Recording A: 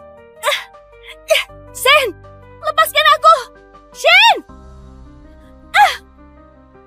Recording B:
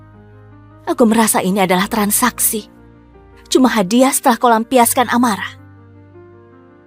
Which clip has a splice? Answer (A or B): B